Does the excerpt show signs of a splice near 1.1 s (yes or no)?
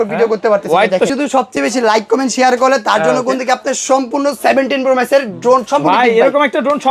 yes